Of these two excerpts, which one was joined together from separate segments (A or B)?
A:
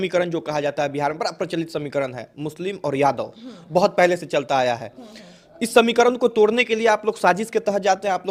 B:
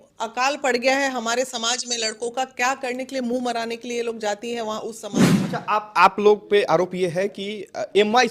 B